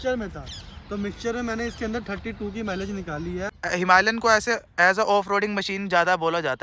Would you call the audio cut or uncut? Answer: cut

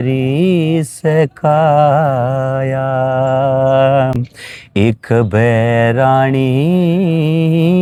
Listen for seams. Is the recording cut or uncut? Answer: uncut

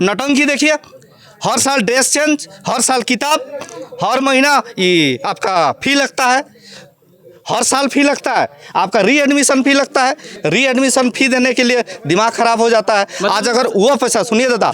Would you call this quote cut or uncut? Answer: uncut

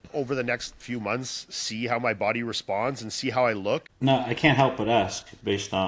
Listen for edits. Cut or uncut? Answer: cut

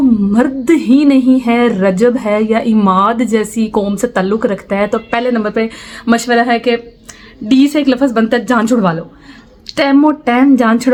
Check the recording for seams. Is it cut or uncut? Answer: uncut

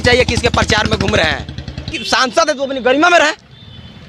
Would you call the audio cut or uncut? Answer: cut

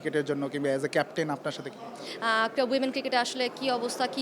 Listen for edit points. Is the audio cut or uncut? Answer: cut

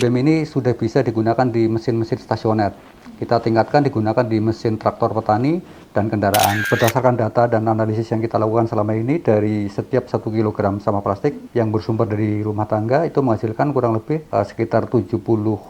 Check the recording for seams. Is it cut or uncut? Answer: cut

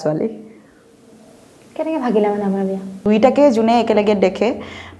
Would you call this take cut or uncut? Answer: cut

